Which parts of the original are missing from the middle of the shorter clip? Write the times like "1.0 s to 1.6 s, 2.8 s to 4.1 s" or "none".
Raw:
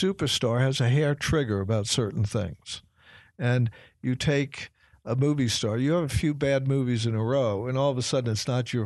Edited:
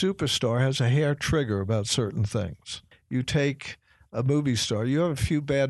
2.9 s to 3.8 s